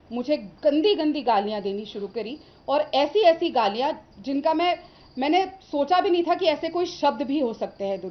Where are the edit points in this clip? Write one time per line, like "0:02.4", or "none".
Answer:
none